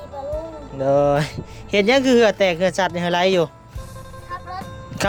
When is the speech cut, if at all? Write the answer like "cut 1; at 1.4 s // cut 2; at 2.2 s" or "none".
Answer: none